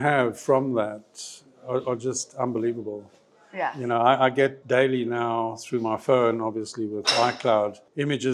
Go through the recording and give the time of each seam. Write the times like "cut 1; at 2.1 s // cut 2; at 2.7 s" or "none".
none